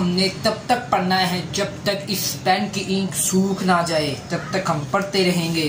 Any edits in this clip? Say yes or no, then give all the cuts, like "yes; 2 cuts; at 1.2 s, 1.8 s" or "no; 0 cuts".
no; 0 cuts